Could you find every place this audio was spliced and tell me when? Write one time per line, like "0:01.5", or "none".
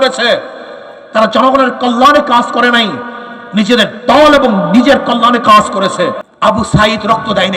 0:06.2

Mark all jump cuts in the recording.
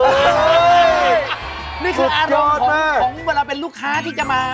none

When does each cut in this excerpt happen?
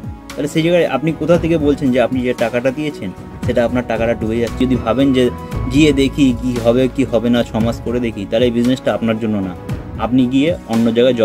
0:04.6

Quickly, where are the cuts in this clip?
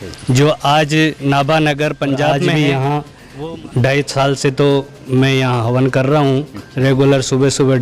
0:02.4

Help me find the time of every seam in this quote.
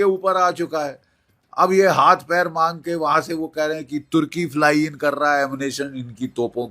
none

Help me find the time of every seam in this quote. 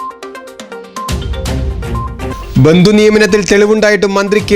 0:02.0

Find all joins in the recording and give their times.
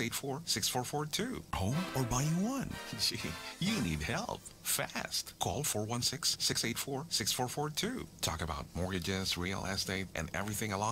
0:01.5

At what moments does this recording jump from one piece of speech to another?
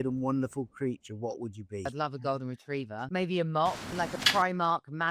0:01.9
0:03.0
0:04.1

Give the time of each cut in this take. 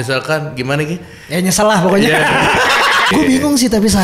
0:03.1

